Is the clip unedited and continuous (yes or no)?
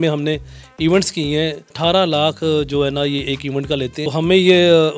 no